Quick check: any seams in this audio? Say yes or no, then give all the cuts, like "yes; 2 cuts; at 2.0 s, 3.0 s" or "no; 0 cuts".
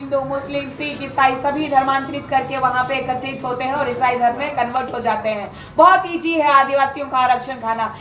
no; 0 cuts